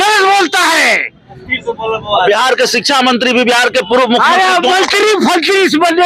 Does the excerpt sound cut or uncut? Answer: uncut